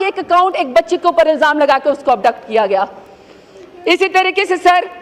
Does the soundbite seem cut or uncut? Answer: uncut